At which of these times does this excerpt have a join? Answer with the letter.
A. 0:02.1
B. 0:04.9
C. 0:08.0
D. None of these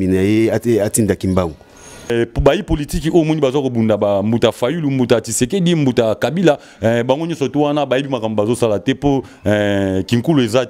A